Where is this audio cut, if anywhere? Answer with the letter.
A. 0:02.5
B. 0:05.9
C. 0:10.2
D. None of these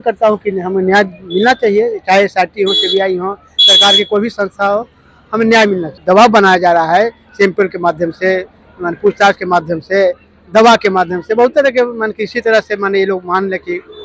B